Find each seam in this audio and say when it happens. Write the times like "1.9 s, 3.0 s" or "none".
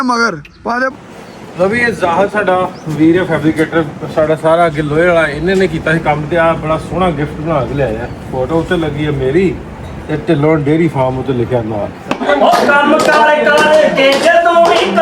0.9 s, 12.2 s